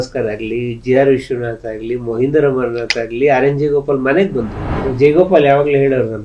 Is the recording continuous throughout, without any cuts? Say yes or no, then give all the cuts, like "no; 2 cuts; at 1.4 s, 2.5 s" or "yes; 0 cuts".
no; 1 cut; at 4.8 s